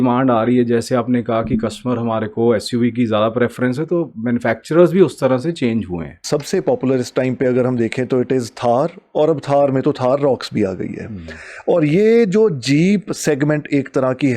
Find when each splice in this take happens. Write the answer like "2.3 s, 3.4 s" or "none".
6.2 s